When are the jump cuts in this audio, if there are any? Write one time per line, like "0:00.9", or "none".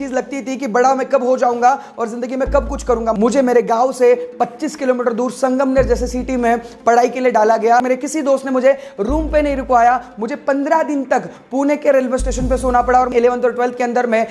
0:03.2
0:07.8
0:13.1